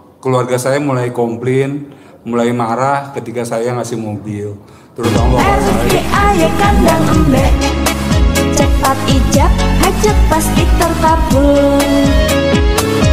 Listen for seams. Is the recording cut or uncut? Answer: cut